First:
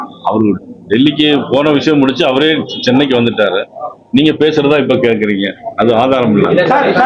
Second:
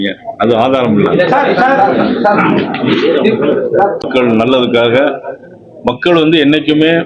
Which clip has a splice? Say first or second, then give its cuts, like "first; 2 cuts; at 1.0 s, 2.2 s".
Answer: second; 1 cut; at 4.1 s